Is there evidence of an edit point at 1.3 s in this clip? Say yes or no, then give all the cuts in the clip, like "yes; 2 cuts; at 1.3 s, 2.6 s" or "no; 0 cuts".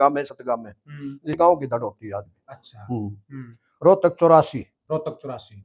yes; 1 cut; at 1.3 s